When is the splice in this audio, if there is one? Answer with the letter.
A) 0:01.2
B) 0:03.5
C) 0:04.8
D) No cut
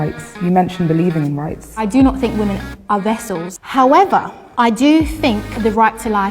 B